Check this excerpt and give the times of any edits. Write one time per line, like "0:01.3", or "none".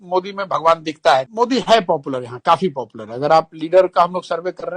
0:01.3